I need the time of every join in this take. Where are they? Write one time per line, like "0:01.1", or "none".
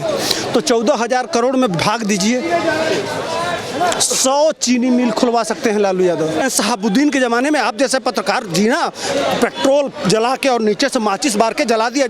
0:06.4